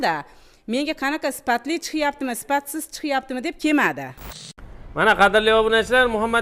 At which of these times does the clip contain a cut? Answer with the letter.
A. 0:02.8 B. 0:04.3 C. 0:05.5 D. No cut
B